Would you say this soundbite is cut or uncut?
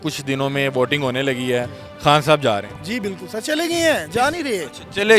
uncut